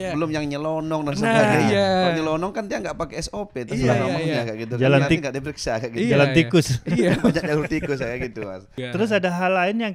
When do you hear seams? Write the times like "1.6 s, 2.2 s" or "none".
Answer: 8.7 s